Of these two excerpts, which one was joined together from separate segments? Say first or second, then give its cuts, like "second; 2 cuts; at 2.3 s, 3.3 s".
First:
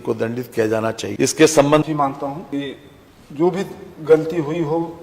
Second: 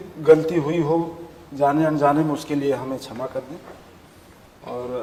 first; 1 cut; at 1.8 s